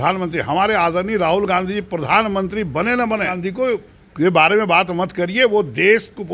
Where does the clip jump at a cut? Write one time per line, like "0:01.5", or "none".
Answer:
0:03.4